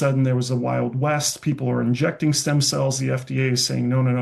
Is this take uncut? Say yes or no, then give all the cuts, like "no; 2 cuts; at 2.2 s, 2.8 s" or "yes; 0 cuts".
yes; 0 cuts